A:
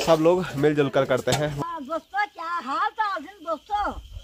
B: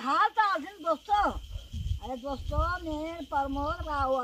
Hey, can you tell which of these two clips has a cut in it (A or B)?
A